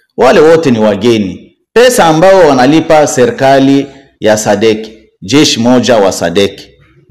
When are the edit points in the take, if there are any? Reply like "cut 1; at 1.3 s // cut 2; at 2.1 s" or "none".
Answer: none